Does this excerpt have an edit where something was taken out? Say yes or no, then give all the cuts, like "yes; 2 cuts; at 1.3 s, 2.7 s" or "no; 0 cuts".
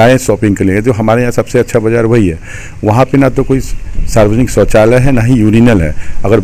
no; 0 cuts